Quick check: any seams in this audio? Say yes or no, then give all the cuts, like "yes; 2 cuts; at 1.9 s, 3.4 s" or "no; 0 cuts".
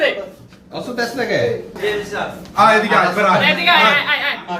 yes; 1 cut; at 1.7 s